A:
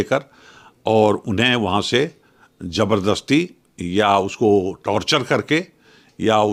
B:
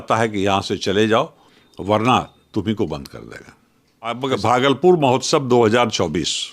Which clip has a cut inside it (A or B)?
B